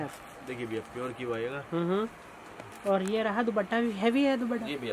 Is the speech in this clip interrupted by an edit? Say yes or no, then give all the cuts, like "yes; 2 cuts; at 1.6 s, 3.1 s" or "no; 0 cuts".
no; 0 cuts